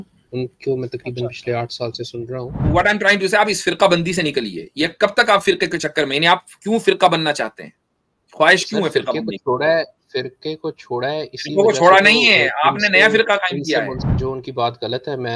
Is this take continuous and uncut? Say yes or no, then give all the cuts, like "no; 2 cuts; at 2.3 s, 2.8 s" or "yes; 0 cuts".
no; 2 cuts; at 2.6 s, 14.1 s